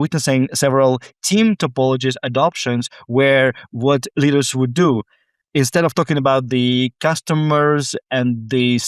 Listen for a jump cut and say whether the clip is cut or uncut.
uncut